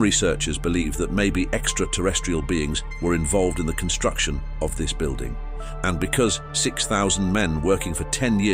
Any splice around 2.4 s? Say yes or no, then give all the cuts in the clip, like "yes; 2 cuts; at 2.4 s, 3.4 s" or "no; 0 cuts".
no; 0 cuts